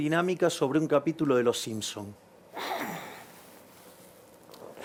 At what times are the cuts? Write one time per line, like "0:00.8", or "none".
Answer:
none